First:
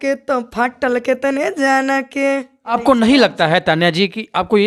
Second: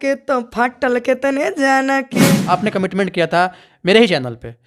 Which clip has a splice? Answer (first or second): second